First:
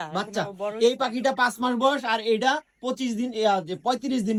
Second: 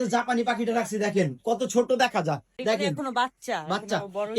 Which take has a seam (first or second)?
second